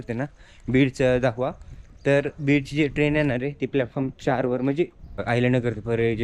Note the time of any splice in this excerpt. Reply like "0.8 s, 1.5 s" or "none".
5.2 s

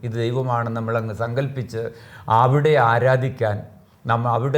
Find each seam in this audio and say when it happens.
none

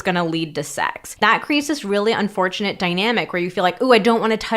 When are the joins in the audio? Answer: 1.2 s

